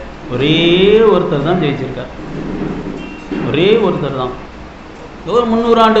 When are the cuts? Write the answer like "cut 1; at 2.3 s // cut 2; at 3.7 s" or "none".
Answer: cut 1; at 4.4 s